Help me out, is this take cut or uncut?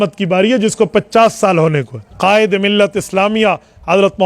cut